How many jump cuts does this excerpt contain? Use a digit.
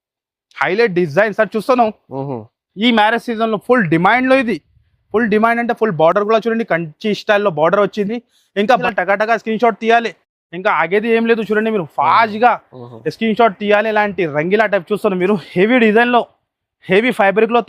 1